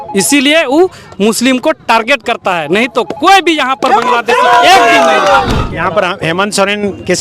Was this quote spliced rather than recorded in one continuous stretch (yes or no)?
yes